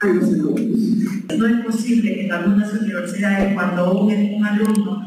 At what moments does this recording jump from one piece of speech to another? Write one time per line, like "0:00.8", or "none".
0:01.2